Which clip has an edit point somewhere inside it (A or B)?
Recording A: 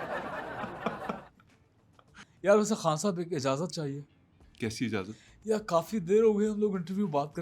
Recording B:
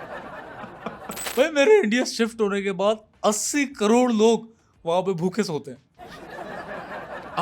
B